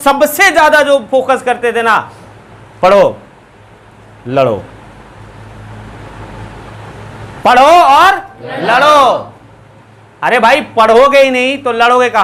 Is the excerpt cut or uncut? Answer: uncut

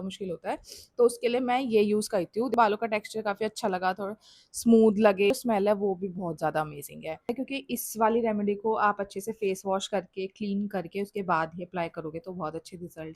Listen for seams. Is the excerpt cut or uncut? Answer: cut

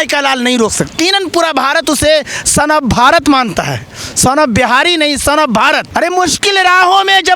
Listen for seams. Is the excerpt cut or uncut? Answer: cut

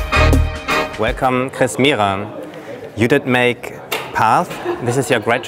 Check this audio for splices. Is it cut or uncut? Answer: uncut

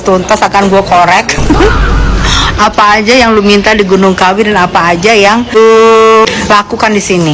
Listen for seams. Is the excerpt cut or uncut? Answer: cut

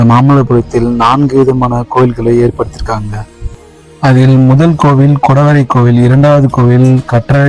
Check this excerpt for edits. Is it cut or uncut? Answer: uncut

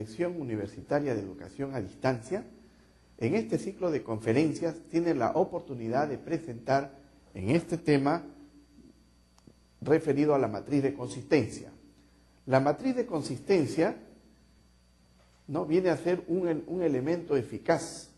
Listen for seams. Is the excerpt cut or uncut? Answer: uncut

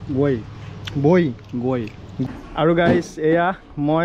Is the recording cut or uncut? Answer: cut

